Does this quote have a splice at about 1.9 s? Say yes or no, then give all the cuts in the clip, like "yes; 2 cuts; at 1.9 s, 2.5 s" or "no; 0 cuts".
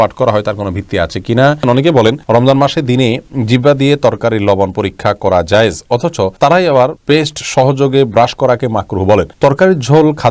yes; 4 cuts; at 1.9 s, 6.3 s, 7.0 s, 9.3 s